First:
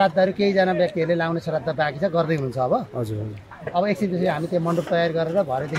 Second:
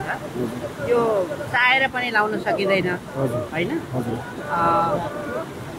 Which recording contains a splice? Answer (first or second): first